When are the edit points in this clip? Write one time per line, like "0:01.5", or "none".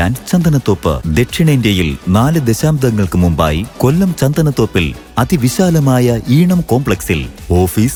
none